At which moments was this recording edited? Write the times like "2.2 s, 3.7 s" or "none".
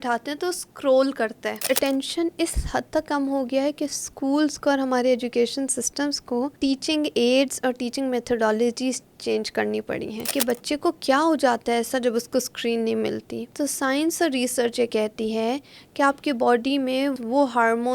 1.6 s, 6.5 s, 10.3 s, 13.4 s, 17.1 s